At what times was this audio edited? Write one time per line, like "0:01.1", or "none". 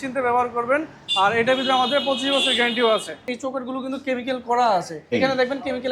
0:03.3
0:05.0